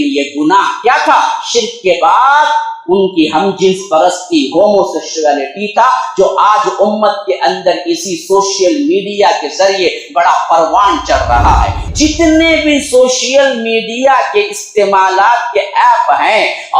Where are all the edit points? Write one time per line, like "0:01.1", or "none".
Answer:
0:11.8